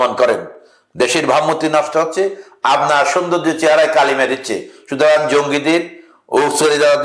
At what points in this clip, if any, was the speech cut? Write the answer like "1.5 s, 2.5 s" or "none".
none